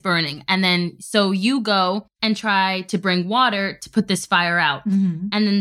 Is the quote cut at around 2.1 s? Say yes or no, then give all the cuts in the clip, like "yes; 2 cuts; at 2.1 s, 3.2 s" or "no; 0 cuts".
yes; 1 cut; at 2.1 s